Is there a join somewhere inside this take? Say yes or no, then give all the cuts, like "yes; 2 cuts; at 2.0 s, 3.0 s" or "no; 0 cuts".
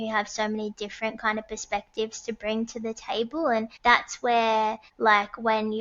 yes; 2 cuts; at 3.7 s, 4.9 s